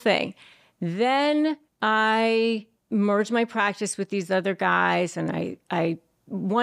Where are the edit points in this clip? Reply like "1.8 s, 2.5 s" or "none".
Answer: 1.7 s, 2.7 s